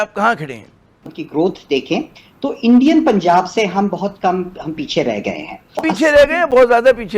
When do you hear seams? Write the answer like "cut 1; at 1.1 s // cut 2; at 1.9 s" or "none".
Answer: cut 1; at 1.0 s // cut 2; at 5.9 s